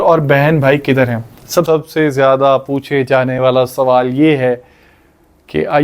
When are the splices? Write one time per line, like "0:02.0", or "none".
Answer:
0:01.7